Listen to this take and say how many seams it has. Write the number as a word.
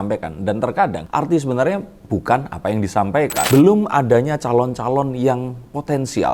two